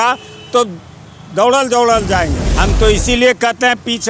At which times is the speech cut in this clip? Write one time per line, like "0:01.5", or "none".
0:02.5